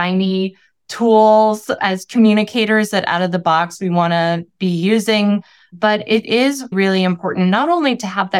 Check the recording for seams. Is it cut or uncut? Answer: cut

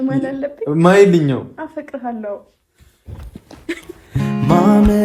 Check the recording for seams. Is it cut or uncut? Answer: uncut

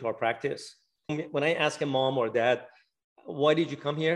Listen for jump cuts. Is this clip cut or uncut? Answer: cut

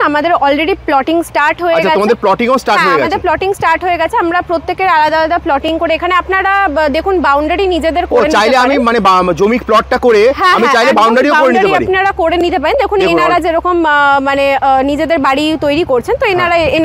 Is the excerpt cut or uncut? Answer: uncut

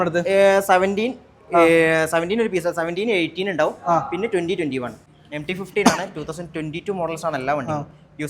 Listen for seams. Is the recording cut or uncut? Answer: cut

